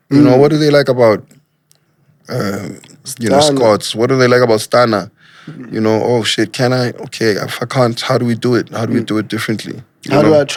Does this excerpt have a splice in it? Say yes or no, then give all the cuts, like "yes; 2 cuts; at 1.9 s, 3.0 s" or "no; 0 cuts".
no; 0 cuts